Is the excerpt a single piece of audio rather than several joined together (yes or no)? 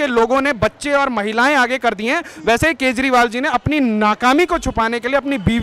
yes